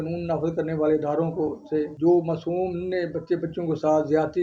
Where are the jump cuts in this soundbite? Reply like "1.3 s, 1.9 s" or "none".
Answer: 1.9 s